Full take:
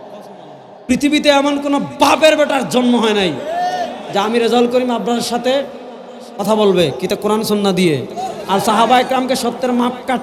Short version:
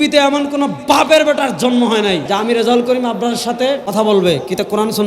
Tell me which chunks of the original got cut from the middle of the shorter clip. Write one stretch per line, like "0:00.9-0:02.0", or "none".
0:03.3-0:04.1
0:05.7-0:06.4